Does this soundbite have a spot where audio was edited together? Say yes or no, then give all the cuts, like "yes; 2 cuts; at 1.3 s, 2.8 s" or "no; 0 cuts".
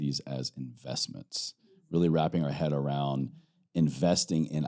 no; 0 cuts